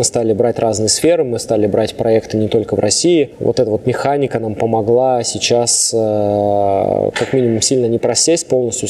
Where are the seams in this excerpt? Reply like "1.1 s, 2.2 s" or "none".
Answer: none